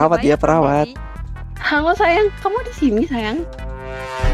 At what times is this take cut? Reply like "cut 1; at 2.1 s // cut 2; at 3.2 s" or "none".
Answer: cut 1; at 1.6 s